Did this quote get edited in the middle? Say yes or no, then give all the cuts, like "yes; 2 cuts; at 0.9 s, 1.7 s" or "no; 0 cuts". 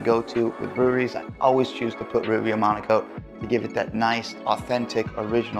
yes; 1 cut; at 4.3 s